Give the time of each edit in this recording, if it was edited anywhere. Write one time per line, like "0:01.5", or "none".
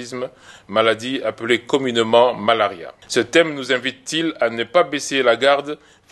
0:02.9